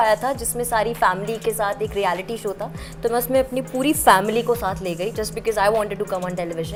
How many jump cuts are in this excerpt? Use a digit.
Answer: 0